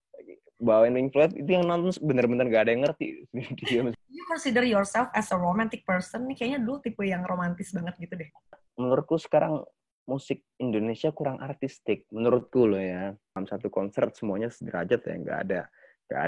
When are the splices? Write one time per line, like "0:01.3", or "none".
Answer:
0:03.9
0:08.6
0:13.4